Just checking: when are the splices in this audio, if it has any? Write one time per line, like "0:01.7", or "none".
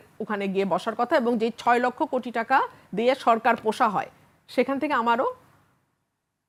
none